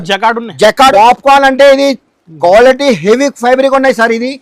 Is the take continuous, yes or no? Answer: no